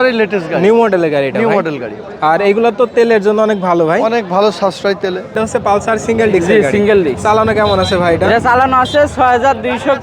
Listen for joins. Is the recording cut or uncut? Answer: cut